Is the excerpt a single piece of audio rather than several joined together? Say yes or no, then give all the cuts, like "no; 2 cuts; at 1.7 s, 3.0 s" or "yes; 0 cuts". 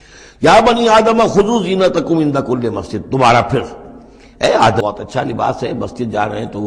no; 1 cut; at 4.8 s